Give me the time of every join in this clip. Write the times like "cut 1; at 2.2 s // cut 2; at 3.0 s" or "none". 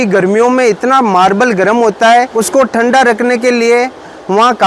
cut 1; at 2.4 s